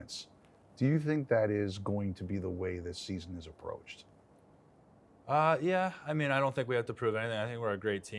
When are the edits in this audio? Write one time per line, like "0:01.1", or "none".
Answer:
none